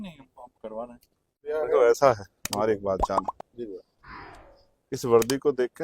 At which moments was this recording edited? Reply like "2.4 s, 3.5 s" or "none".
1.5 s

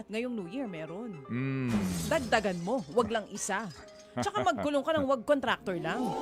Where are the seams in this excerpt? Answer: none

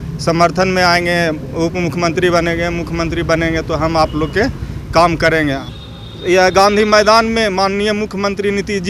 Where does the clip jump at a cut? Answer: 5.7 s

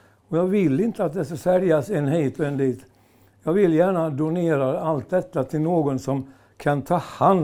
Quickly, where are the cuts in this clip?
none

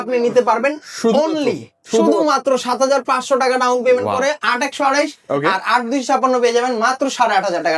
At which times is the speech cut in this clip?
none

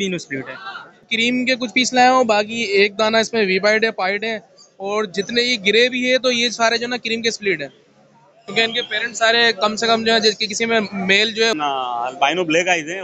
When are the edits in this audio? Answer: 1.1 s, 11.5 s

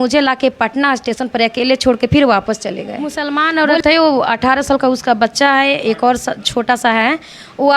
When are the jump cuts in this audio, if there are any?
3.4 s

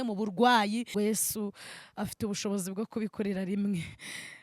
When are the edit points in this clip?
0.9 s

